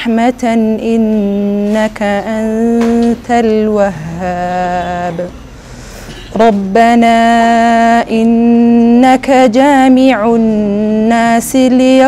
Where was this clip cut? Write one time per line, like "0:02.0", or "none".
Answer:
none